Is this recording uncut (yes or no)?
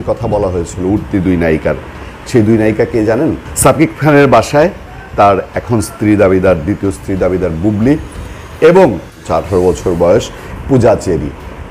no